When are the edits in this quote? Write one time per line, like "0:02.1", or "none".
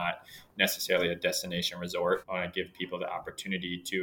0:02.2

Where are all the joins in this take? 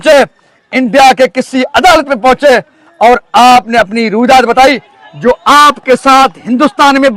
none

